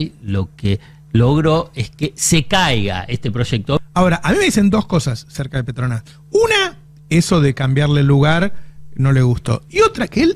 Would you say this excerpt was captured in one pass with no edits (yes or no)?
no